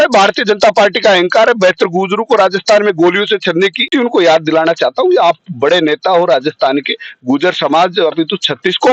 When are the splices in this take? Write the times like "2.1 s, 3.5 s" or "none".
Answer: 3.8 s